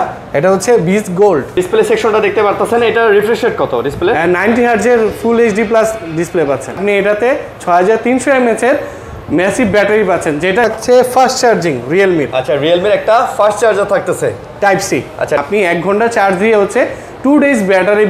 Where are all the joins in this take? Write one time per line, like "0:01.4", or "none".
0:01.5
0:06.7
0:10.7
0:15.4